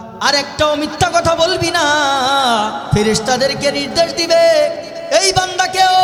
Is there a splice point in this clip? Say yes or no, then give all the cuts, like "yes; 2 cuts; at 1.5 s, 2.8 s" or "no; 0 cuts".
no; 0 cuts